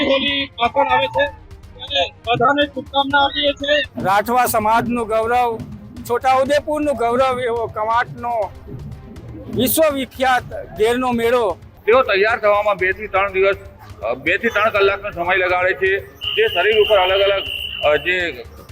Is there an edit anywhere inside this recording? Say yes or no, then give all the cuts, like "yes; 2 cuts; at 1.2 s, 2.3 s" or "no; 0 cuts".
yes; 2 cuts; at 3.9 s, 11.7 s